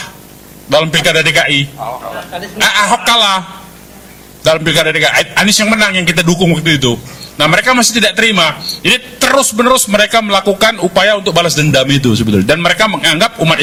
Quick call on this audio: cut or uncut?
uncut